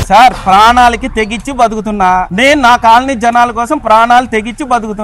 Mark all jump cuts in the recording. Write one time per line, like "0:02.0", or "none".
0:02.3